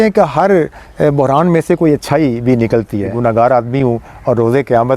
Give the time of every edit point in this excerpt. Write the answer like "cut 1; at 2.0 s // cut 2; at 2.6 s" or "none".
cut 1; at 3.2 s